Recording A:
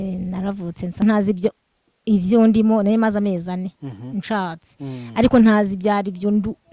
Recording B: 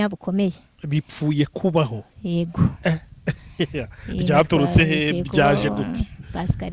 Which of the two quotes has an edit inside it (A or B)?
A